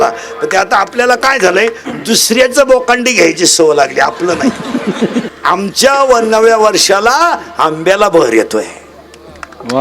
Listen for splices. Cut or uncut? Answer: cut